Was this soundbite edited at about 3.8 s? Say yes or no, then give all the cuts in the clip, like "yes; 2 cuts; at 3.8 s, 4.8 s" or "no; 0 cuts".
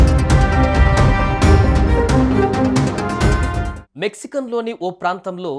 yes; 1 cut; at 3.8 s